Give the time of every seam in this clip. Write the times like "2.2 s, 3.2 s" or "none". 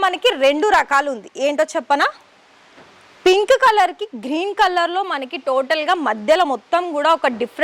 none